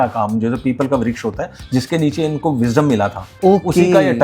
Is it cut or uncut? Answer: uncut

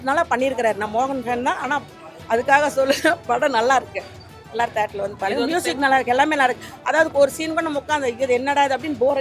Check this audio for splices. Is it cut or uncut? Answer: uncut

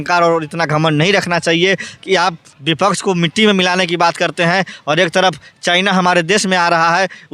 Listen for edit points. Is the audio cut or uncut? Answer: uncut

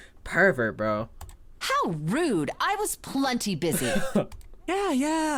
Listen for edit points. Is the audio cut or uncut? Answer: uncut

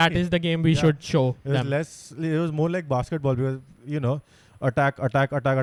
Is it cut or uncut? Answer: uncut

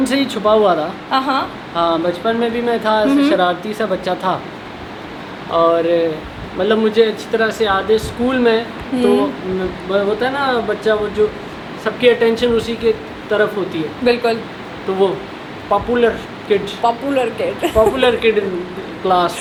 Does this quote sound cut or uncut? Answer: uncut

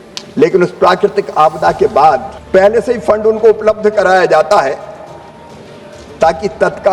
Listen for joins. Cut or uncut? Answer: cut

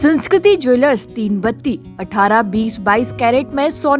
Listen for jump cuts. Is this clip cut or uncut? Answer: uncut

